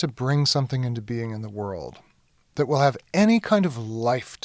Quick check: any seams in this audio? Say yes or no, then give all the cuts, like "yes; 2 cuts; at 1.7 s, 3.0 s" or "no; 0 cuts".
no; 0 cuts